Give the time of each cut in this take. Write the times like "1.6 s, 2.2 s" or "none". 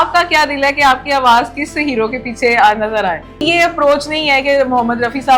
3.4 s